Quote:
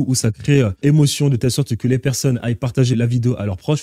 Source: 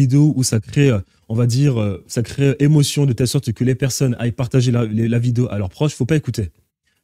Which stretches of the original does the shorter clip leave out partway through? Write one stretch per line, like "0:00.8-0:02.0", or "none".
0:01.1-0:02.6
0:04.7-0:05.1